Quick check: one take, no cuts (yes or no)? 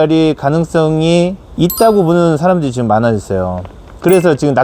no